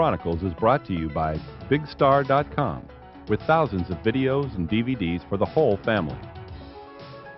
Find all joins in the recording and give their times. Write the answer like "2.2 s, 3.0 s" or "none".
6.1 s